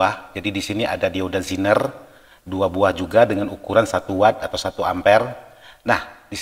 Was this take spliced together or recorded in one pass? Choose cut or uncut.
uncut